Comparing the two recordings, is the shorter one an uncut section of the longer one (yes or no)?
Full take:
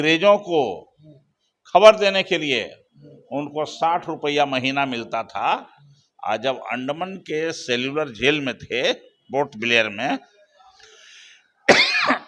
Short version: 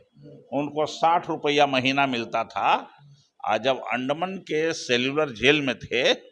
yes